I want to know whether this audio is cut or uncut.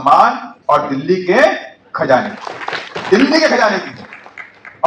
uncut